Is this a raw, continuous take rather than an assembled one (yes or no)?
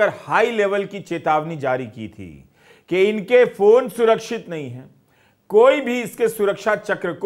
yes